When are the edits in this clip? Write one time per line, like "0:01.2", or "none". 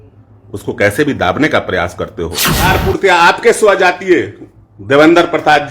0:02.7